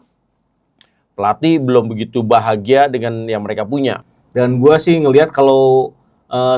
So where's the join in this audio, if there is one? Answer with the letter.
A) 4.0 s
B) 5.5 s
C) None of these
A